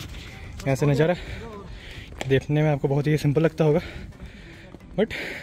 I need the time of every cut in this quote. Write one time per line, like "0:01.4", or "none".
none